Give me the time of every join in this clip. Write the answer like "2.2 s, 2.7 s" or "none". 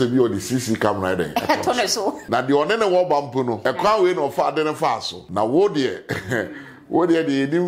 2.2 s, 3.6 s, 5.1 s